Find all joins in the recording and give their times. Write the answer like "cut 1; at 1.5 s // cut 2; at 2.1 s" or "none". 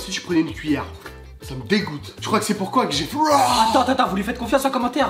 none